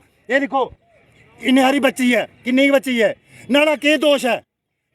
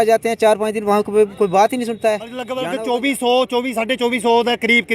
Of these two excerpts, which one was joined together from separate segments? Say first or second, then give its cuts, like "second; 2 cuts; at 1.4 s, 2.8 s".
second; 1 cut; at 2.5 s